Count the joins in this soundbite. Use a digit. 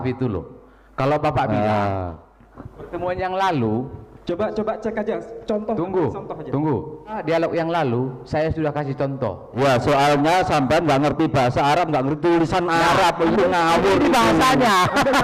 2